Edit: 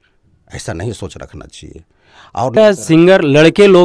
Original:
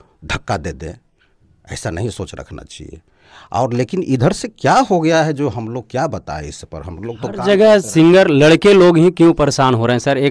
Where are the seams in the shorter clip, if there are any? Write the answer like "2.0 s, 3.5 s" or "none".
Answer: 2.6 s